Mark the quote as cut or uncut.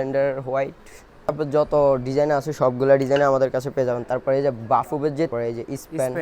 cut